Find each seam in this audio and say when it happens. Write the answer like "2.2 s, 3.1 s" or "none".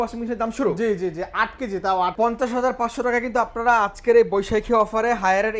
2.1 s